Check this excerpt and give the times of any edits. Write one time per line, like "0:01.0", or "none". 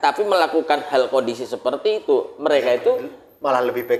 none